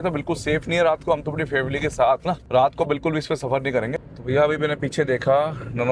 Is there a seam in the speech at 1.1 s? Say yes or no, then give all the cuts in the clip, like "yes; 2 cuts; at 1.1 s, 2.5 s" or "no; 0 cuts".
no; 2 cuts; at 2.4 s, 3.9 s